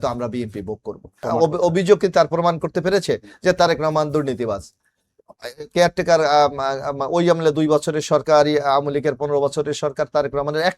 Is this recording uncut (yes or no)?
no